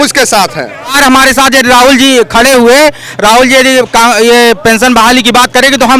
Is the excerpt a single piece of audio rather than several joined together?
no; 1 cut; at 1.0 s

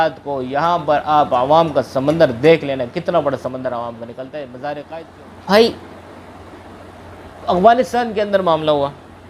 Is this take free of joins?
no; 1 cut; at 5.0 s

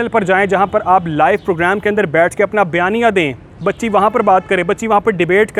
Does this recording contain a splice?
no; 0 cuts

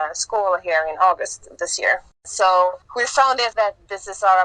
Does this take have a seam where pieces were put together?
yes; 2 cuts; at 2.2 s, 3.1 s

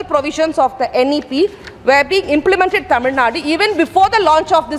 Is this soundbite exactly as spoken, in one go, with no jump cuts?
yes; 0 cuts

